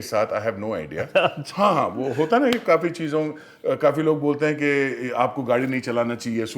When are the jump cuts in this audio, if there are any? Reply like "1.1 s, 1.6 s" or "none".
none